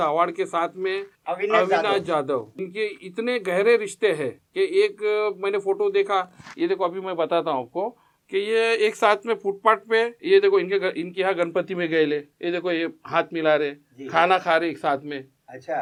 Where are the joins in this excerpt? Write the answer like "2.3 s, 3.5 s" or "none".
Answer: none